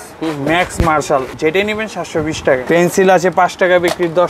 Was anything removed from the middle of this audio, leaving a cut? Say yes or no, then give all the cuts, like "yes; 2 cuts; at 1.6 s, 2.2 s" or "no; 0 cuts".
yes; 2 cuts; at 1.3 s, 2.6 s